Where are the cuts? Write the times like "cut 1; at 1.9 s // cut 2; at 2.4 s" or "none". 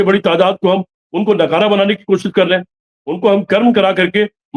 none